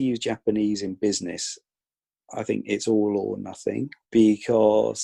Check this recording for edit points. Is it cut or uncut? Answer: cut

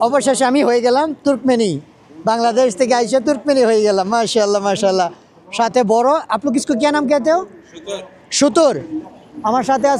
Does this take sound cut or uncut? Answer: uncut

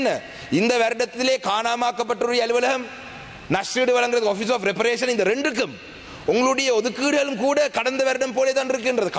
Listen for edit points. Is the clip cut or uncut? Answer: uncut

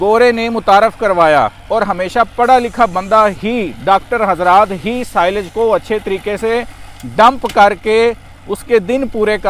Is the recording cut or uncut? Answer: uncut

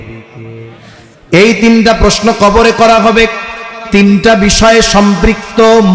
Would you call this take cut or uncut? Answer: cut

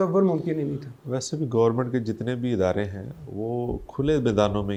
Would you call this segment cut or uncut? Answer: uncut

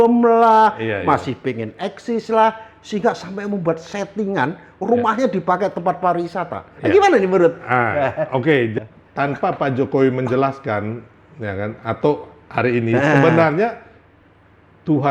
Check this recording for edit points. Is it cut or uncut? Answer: cut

